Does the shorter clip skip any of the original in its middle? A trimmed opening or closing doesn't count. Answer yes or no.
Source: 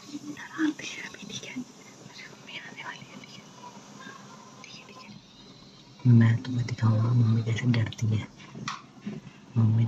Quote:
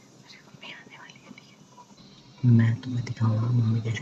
yes